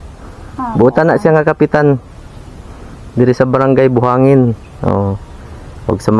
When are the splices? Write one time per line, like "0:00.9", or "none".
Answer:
none